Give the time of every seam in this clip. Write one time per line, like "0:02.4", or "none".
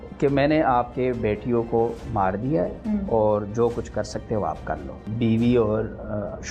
0:05.0